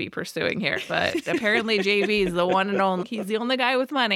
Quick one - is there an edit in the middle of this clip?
yes; 1 cut; at 3.1 s

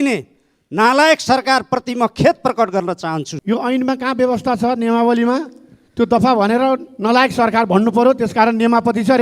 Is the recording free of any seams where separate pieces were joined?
no; 1 cut; at 3.3 s

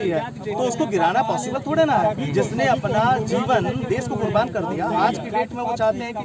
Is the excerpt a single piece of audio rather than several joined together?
yes; 0 cuts

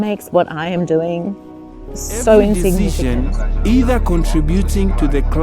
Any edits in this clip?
yes; 1 cut; at 2.9 s

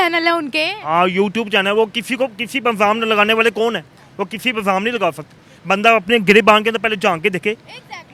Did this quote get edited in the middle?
no; 0 cuts

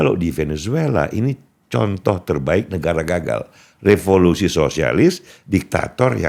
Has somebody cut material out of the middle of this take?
no; 0 cuts

